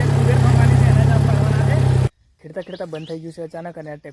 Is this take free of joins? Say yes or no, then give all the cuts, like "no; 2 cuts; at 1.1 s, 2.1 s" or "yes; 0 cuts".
no; 1 cut; at 2.1 s